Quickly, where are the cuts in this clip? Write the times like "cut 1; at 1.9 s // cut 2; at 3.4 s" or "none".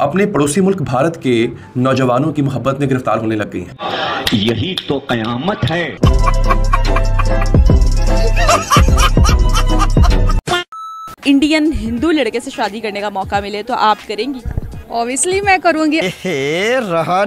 none